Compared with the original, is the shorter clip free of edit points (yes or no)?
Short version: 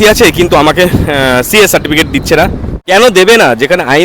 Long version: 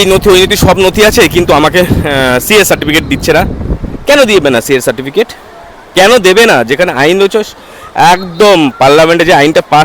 no